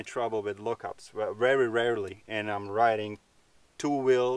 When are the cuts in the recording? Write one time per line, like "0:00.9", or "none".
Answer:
none